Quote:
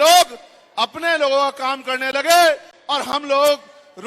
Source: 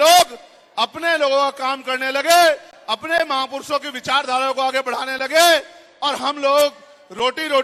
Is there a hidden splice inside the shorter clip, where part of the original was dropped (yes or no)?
yes